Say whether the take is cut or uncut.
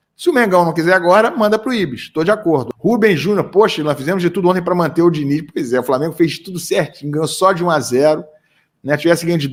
uncut